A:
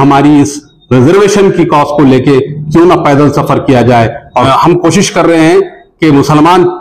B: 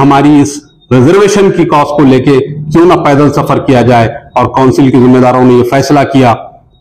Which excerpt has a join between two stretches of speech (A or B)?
A